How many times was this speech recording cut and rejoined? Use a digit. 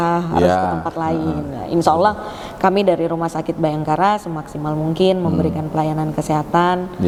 0